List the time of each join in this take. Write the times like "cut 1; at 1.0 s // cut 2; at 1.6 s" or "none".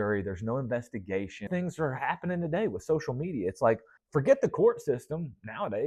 cut 1; at 1.5 s // cut 2; at 3.9 s